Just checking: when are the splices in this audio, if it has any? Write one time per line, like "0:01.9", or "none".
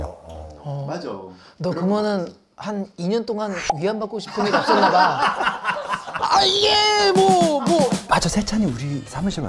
0:06.2
0:08.0